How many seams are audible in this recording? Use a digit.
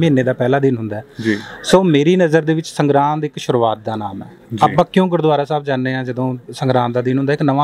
0